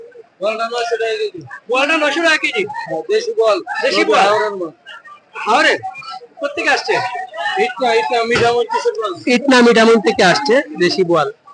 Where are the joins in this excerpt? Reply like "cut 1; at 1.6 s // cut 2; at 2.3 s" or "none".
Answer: none